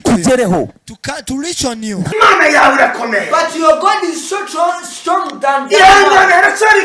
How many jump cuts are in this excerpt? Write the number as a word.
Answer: one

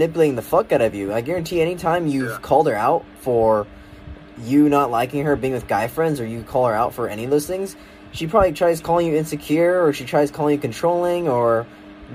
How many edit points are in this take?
zero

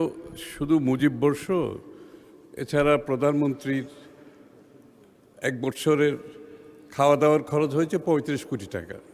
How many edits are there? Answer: zero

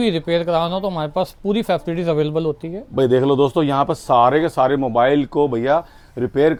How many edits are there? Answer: zero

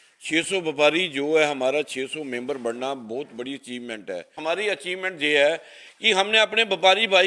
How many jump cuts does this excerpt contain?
one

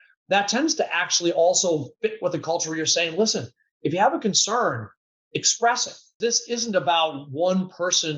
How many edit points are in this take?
one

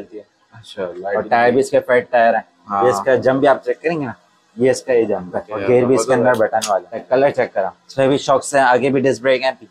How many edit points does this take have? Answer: three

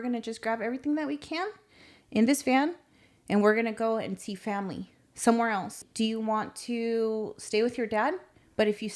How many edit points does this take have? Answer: one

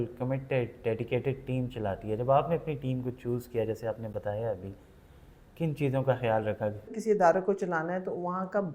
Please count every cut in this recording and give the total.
one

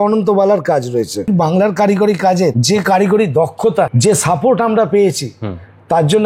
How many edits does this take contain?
three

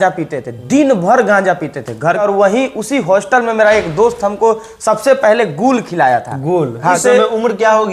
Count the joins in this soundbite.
two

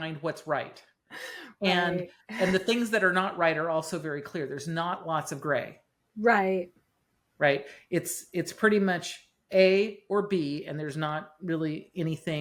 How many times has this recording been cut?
zero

